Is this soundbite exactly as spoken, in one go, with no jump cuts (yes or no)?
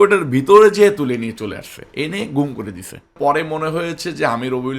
no